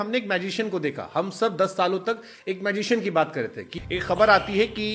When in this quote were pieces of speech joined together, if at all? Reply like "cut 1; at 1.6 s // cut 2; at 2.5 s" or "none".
cut 1; at 3.8 s